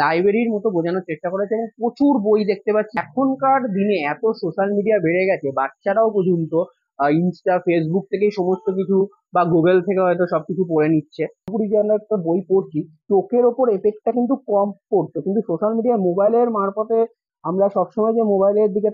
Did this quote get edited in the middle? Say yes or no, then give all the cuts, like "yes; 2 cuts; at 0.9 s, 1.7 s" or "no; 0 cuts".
yes; 2 cuts; at 2.9 s, 11.5 s